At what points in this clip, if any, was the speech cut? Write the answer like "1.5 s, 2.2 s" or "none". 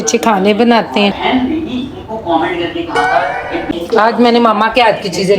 1.2 s, 3.7 s